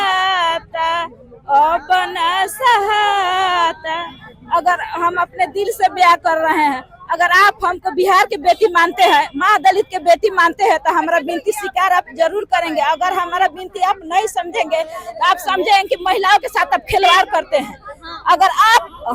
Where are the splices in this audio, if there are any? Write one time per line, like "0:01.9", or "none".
none